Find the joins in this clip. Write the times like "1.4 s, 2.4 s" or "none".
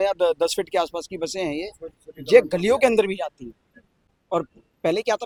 none

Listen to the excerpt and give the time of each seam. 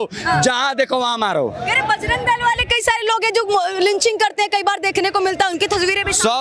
none

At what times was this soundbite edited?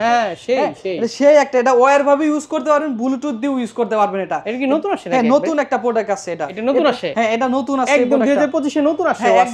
6.5 s

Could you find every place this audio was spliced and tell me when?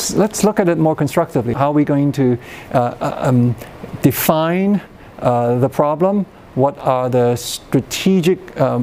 1.5 s

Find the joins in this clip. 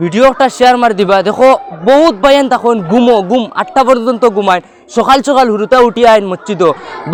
none

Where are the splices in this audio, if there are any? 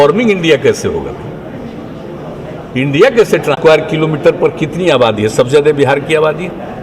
3.6 s

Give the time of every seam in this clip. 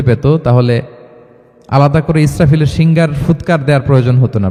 none

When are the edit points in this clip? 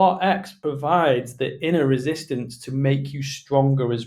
none

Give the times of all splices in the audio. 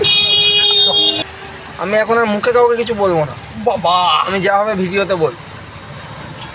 1.2 s

